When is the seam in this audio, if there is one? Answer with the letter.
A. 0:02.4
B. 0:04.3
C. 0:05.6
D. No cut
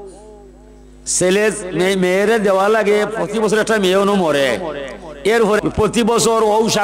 C